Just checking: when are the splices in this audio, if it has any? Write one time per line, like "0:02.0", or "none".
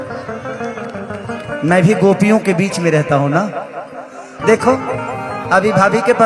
0:04.3